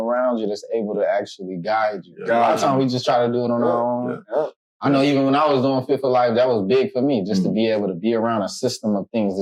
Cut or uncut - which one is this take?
uncut